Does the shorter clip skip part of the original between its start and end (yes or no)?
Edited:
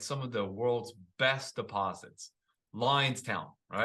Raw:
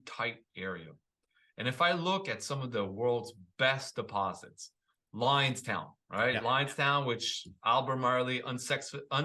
no